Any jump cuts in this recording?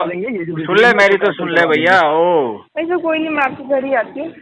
yes; 1 cut; at 2.6 s

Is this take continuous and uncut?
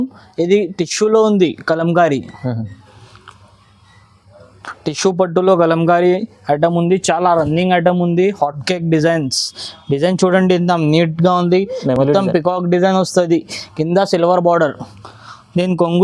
yes; 0 cuts

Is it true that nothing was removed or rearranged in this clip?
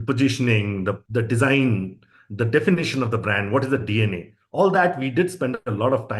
no; 1 cut; at 1.0 s

